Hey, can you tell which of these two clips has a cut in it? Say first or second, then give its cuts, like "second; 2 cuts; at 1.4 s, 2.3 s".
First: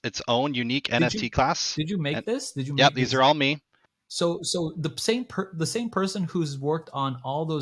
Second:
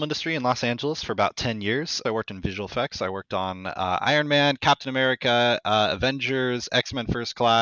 second; 1 cut; at 1.9 s